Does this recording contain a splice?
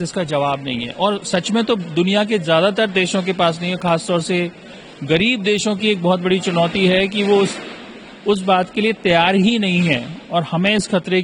no; 0 cuts

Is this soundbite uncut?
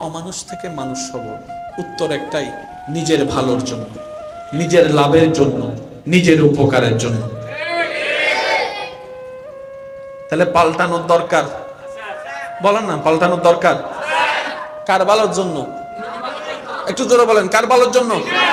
yes; 0 cuts

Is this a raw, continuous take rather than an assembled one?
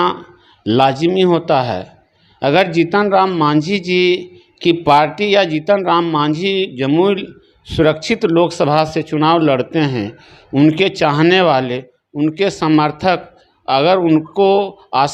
yes; 0 cuts

